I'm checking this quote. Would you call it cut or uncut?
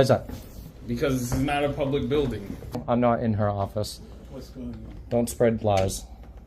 cut